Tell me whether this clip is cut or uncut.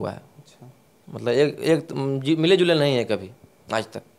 uncut